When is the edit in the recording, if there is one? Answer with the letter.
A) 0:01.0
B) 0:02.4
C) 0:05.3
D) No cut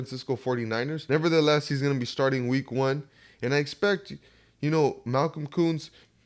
A